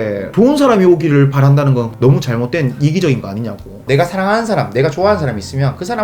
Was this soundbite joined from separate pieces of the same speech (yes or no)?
yes